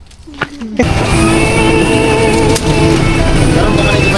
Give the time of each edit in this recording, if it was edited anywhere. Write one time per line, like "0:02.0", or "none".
0:00.9